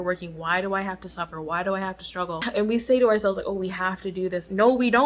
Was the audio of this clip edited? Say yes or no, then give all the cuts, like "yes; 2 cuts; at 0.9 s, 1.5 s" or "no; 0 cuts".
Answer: yes; 1 cut; at 2.5 s